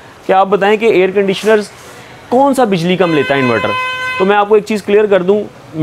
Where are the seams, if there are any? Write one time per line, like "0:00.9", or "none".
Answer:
none